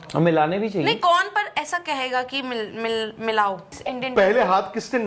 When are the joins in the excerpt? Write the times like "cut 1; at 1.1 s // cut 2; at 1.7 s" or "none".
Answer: cut 1; at 3.8 s